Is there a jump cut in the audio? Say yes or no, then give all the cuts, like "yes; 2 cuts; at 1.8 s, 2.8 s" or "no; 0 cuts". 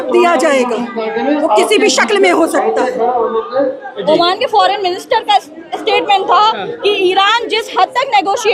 no; 0 cuts